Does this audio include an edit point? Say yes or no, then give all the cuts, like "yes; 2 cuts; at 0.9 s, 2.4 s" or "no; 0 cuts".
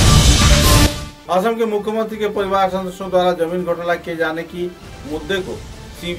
yes; 1 cut; at 1.1 s